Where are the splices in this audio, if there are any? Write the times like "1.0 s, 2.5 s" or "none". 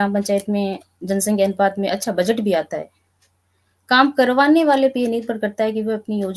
none